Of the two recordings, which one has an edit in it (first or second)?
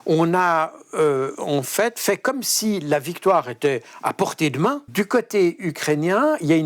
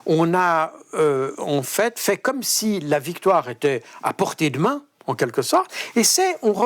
first